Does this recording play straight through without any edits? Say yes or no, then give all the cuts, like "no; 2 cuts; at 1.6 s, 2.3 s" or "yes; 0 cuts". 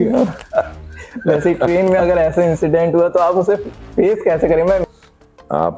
no; 1 cut; at 4.8 s